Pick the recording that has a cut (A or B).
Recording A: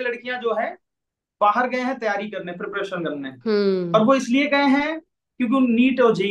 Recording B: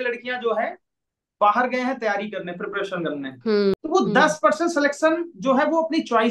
B